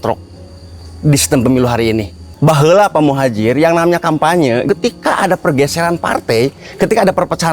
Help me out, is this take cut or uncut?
cut